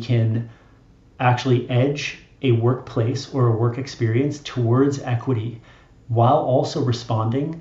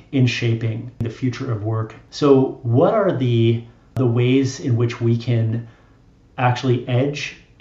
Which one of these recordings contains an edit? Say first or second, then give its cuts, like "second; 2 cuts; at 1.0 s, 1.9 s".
second; 3 cuts; at 1.0 s, 2.0 s, 3.9 s